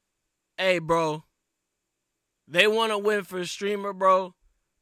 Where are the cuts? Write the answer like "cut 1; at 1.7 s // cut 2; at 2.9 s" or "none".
none

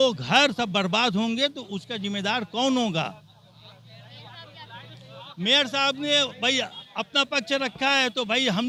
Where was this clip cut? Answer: none

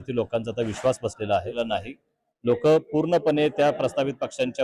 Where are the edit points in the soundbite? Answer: cut 1; at 1.5 s

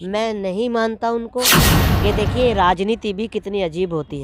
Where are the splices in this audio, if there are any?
cut 1; at 1.7 s

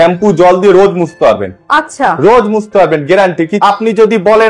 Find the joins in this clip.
cut 1; at 3.6 s

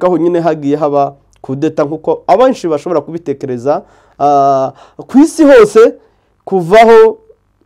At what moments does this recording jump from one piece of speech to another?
none

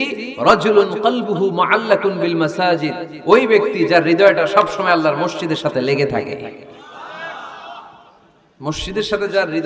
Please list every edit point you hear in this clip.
none

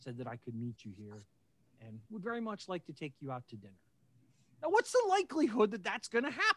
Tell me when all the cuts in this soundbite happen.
none

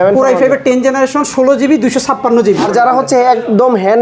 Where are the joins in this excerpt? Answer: cut 1; at 2.7 s

